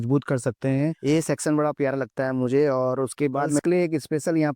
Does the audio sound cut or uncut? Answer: cut